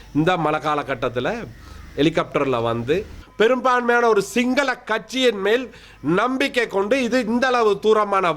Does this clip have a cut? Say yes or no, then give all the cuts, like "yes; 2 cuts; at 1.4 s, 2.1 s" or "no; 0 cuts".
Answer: yes; 1 cut; at 3.2 s